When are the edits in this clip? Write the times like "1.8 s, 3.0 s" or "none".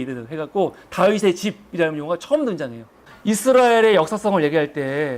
3.1 s